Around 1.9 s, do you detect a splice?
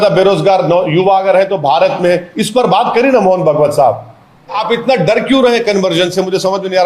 no; 1 cut; at 4.6 s

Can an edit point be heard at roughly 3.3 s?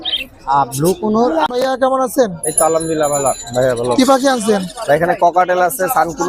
no; 1 cut; at 1.5 s

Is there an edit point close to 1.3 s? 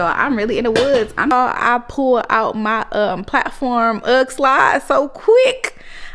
yes; 1 cut; at 1.3 s

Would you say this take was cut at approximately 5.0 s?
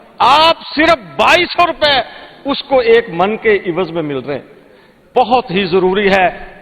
yes; 1 cut; at 5.0 s

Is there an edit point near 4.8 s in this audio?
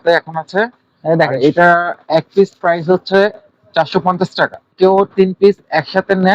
yes; 1 cut; at 4.8 s

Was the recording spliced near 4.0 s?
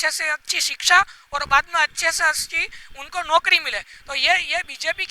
no; 0 cuts

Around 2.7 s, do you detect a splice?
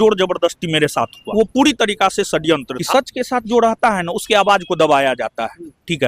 yes; 2 cuts; at 1.2 s, 2.7 s

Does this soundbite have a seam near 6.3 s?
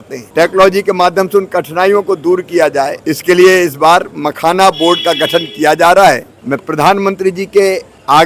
no; 0 cuts

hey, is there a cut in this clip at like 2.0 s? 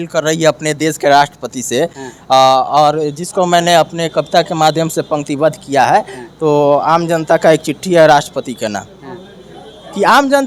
no; 0 cuts

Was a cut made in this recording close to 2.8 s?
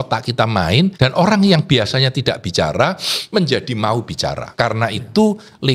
no; 2 cuts; at 0.9 s, 4.4 s

